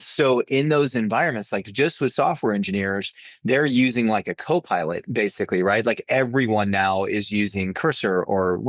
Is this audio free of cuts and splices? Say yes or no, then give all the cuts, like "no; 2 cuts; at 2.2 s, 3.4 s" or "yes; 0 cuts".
yes; 0 cuts